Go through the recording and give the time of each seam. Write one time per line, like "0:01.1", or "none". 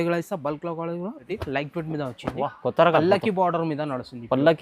0:01.3